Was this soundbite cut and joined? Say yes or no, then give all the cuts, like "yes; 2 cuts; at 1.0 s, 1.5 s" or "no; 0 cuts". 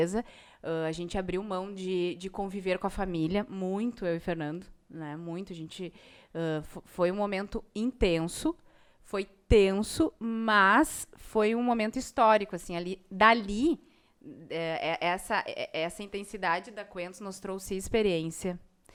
no; 0 cuts